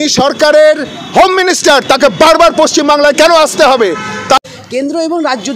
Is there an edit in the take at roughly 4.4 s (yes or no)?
yes